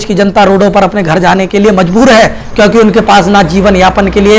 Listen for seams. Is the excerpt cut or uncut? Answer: uncut